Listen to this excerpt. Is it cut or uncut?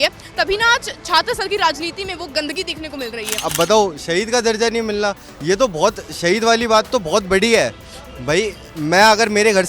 cut